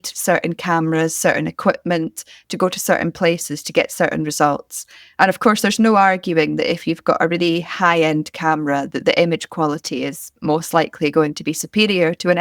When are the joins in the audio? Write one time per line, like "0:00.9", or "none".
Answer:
none